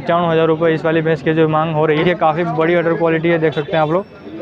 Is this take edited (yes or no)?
yes